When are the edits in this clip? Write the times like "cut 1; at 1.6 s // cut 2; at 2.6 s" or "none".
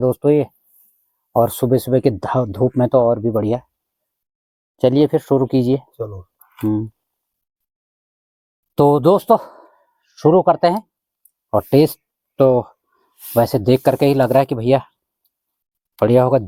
none